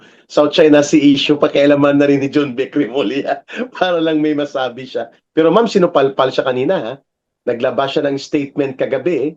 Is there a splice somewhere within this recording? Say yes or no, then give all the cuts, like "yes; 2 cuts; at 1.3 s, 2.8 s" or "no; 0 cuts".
no; 0 cuts